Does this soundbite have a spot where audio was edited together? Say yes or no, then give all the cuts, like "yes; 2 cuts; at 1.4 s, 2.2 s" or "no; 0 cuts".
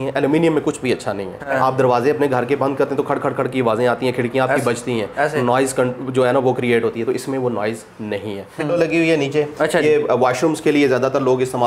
yes; 2 cuts; at 1.4 s, 8.7 s